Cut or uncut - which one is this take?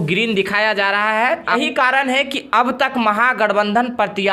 cut